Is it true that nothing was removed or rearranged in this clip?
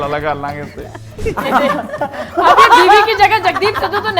no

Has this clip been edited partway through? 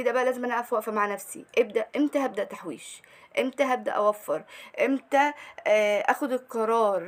no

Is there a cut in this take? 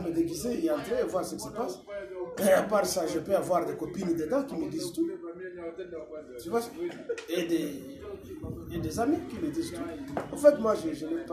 no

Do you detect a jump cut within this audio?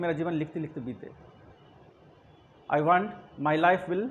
no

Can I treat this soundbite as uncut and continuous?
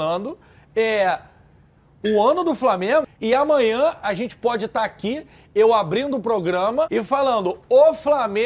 no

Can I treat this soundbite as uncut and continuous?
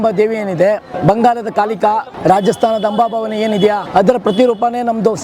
no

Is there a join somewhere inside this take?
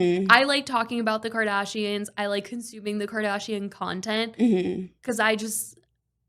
no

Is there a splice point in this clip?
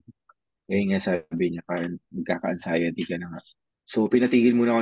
yes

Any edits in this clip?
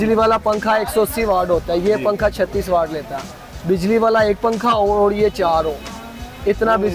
no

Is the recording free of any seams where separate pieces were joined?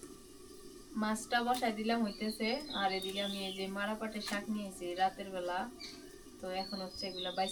yes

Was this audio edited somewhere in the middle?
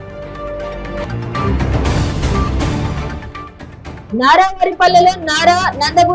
yes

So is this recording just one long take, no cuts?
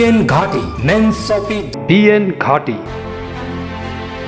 no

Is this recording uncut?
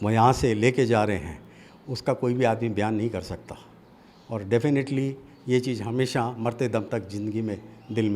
yes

